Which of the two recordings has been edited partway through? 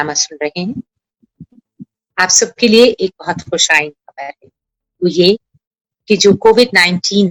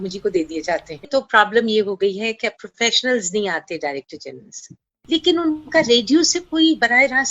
second; 2 cuts; at 1.0 s, 4.9 s

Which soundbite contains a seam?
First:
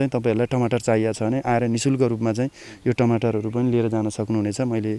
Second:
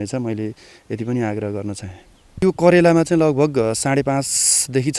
second; 1 cut; at 2.4 s

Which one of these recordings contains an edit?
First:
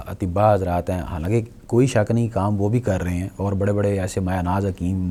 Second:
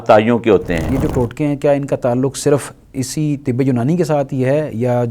second; 1 cut; at 0.9 s

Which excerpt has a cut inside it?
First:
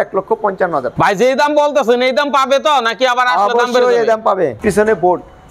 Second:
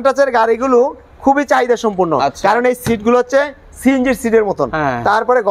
first; 2 cuts; at 0.9 s, 4.6 s

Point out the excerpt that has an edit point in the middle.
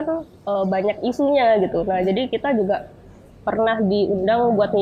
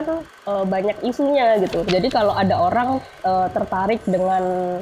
second; 1 cut; at 1.8 s

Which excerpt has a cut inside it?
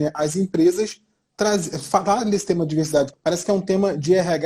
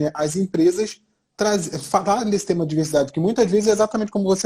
first; 1 cut; at 3.1 s

